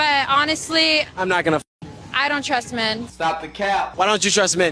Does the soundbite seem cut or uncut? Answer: cut